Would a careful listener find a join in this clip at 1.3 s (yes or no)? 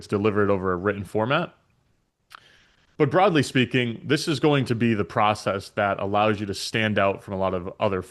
no